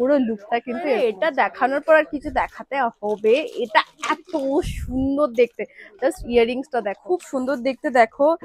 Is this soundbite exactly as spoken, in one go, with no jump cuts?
no; 2 cuts; at 1.0 s, 7.0 s

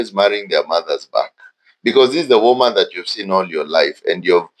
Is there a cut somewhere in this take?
no; 0 cuts

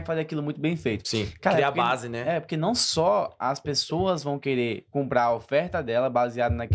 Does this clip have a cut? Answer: no; 0 cuts

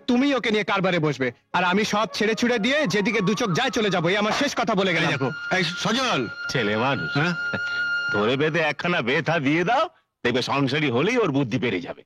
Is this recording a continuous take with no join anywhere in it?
yes; 0 cuts

